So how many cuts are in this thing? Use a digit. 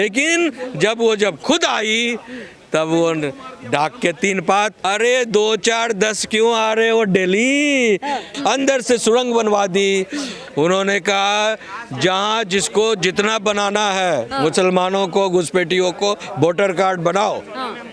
3